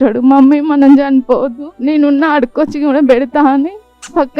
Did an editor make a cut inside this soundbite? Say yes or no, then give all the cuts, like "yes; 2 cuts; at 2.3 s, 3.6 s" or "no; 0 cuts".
yes; 1 cut; at 1.6 s